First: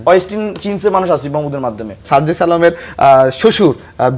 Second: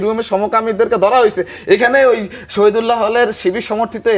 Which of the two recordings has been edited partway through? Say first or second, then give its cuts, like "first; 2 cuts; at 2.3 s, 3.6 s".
first; 1 cut; at 2.0 s